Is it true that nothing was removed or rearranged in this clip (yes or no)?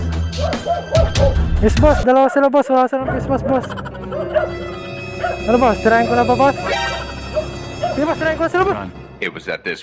yes